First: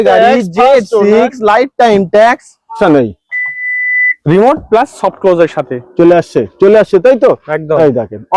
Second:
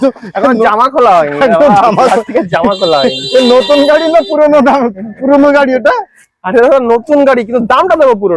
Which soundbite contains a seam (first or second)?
first